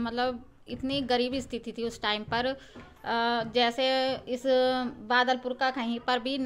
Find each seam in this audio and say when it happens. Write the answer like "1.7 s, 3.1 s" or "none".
none